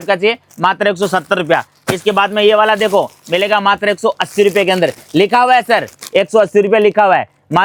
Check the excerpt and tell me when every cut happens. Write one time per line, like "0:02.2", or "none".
none